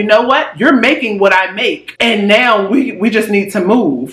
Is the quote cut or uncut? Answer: cut